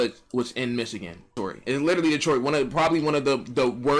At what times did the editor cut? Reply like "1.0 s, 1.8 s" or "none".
none